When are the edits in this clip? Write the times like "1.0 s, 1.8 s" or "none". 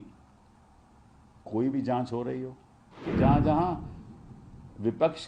3.1 s